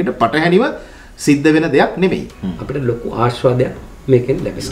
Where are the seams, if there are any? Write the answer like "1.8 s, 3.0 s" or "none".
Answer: 2.3 s